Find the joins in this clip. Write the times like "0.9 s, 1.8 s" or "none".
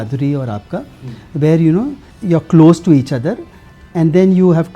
2.1 s